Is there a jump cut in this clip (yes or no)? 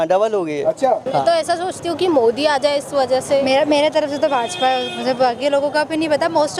yes